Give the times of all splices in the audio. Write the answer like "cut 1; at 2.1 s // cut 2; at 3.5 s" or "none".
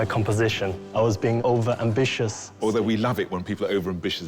cut 1; at 1.1 s // cut 2; at 2.5 s